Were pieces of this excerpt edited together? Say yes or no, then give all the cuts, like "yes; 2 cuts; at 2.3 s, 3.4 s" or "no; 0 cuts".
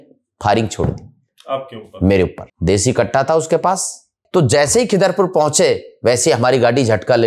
yes; 2 cuts; at 2.5 s, 4.1 s